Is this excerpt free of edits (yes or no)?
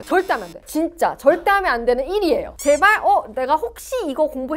yes